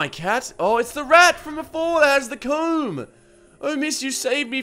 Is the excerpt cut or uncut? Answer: uncut